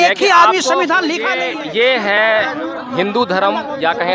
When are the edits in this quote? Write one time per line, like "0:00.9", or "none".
0:01.4

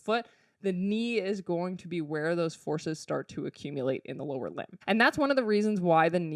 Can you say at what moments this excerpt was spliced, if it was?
0:04.7

